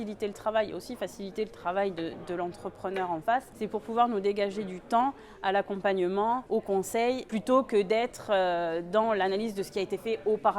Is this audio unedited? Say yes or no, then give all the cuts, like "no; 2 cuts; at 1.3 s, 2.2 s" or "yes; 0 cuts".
no; 3 cuts; at 3.5 s, 6.4 s, 7.2 s